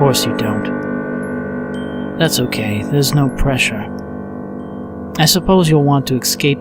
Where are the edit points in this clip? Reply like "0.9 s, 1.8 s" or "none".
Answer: 1.1 s